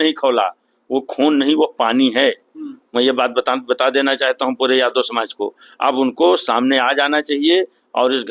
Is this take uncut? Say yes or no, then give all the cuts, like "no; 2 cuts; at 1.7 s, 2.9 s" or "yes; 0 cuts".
yes; 0 cuts